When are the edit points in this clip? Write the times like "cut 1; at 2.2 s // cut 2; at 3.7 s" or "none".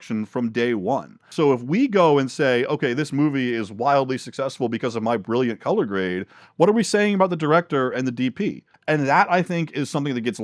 cut 1; at 8.7 s